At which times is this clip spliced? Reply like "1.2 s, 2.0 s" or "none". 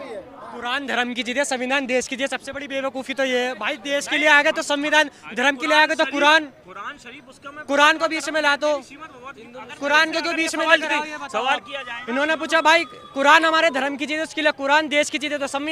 none